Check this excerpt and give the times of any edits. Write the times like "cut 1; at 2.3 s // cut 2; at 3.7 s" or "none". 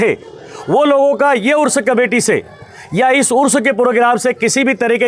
none